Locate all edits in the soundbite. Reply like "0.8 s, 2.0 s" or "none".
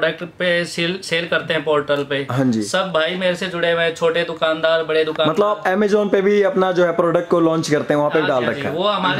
none